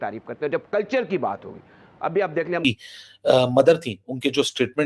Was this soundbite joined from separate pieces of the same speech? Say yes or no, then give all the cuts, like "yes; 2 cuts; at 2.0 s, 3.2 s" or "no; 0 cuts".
yes; 1 cut; at 2.6 s